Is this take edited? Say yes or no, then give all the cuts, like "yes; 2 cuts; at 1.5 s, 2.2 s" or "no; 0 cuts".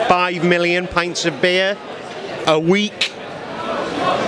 no; 0 cuts